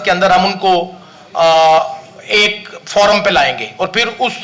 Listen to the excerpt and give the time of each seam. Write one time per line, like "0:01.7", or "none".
none